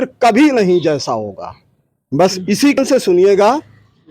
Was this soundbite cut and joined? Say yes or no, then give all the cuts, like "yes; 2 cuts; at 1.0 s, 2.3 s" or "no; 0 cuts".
yes; 1 cut; at 2.8 s